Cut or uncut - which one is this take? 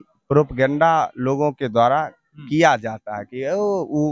uncut